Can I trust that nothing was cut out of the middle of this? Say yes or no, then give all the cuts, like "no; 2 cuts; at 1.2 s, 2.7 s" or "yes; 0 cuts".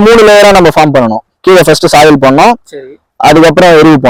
yes; 0 cuts